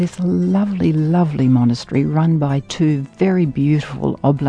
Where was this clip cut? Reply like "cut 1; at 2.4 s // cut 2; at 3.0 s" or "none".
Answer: none